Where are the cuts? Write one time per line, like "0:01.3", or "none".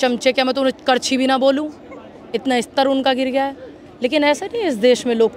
none